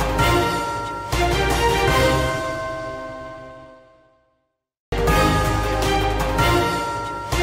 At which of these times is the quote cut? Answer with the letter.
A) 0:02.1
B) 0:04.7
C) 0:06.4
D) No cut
B